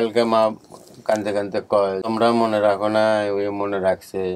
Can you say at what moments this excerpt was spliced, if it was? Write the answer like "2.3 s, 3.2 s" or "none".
2.0 s